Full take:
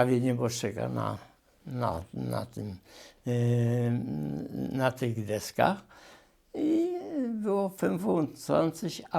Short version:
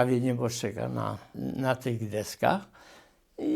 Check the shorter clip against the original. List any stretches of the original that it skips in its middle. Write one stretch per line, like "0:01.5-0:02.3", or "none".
0:01.3-0:04.5